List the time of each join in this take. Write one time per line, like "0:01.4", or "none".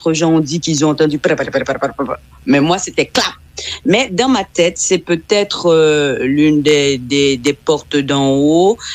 none